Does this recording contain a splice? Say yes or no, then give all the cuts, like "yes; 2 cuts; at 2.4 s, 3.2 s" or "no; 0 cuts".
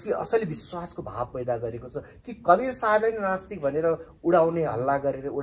no; 0 cuts